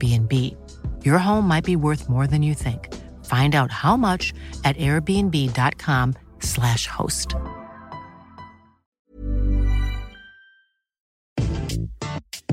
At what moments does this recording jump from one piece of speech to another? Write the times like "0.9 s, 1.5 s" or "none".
11.2 s

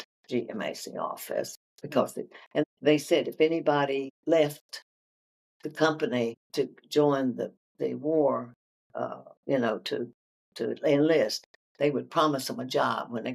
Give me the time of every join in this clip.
2.6 s, 4.1 s, 6.4 s

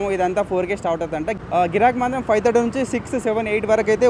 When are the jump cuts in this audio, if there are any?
1.3 s

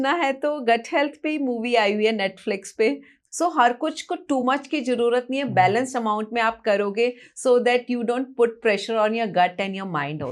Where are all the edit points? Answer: 3.1 s

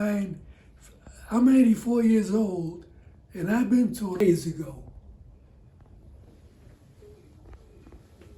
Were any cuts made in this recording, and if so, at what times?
4.2 s

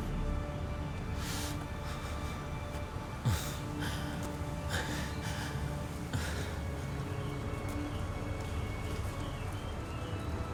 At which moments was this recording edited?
none

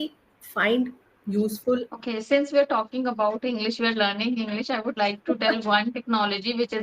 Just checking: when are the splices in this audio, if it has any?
1.9 s

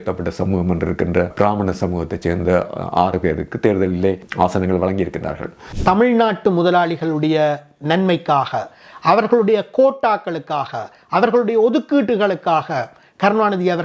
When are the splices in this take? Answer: 1.3 s, 4.3 s, 5.6 s

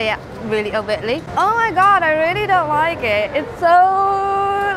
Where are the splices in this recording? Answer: none

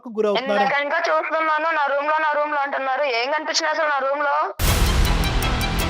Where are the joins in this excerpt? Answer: 4.6 s

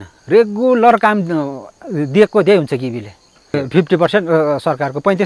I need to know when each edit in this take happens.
3.5 s

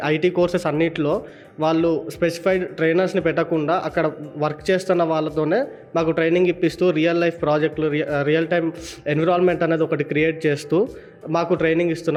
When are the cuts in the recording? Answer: none

